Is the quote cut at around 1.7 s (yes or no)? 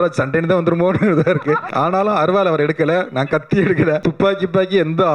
yes